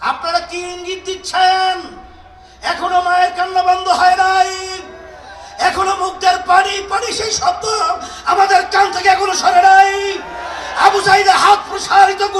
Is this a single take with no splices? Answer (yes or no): yes